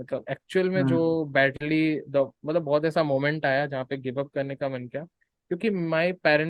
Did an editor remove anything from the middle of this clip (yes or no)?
no